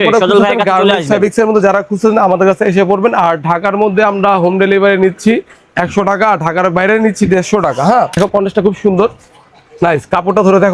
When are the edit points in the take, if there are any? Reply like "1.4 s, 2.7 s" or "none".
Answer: 8.1 s